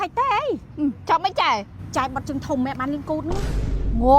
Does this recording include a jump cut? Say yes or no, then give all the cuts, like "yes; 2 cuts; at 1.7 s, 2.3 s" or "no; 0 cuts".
yes; 1 cut; at 1.8 s